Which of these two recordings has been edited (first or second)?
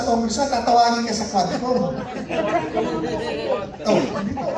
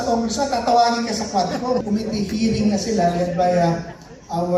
second